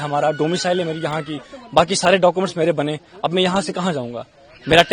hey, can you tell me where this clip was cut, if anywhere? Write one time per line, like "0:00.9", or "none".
none